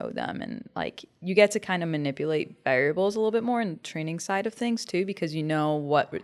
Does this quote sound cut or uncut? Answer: uncut